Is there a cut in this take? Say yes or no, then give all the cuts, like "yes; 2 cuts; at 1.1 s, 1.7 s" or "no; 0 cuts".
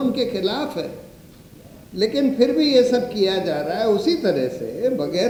no; 0 cuts